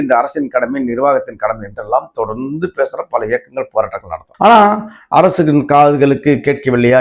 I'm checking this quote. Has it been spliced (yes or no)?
no